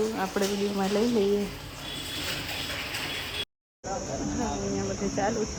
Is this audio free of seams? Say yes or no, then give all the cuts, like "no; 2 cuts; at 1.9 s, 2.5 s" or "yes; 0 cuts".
yes; 0 cuts